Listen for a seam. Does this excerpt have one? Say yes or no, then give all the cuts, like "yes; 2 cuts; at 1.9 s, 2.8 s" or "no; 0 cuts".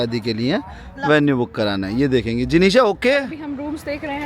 yes; 1 cut; at 3.3 s